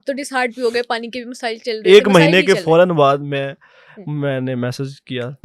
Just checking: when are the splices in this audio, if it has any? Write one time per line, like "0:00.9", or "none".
none